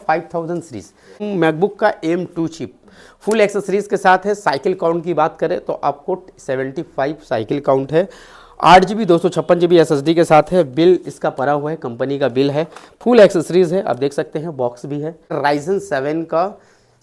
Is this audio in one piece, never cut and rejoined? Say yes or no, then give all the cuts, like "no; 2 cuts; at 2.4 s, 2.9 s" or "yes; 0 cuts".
no; 2 cuts; at 1.3 s, 15.4 s